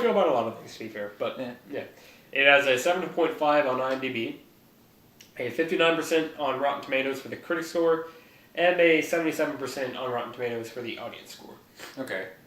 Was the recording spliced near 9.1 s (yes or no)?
yes